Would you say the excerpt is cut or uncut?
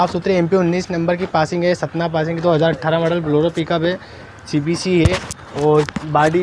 uncut